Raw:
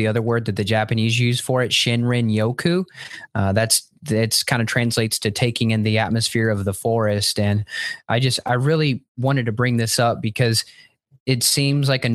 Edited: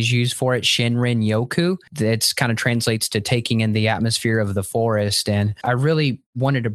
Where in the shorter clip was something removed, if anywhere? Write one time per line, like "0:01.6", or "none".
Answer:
0:01.9
0:05.6